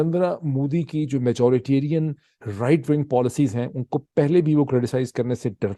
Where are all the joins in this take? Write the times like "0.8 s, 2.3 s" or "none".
none